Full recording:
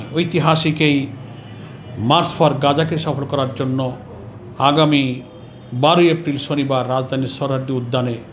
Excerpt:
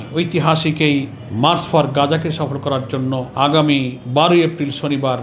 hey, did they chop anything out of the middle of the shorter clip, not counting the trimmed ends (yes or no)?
yes